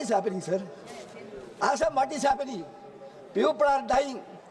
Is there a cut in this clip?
no; 0 cuts

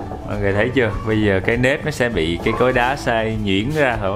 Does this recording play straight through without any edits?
yes; 0 cuts

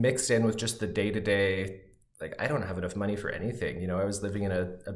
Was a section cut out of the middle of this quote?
no; 0 cuts

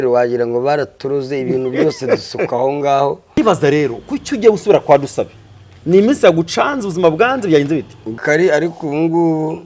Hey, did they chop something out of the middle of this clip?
yes; 2 cuts; at 3.4 s, 8.2 s

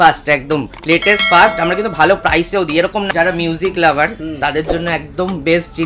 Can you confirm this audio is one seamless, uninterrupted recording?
no; 1 cut; at 3.1 s

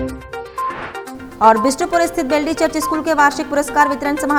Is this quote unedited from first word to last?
yes; 0 cuts

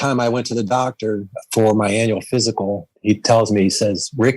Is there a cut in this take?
yes; 1 cut; at 2.9 s

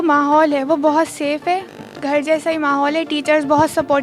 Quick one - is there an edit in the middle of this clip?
no; 0 cuts

